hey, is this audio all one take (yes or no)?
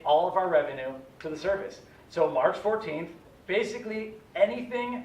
no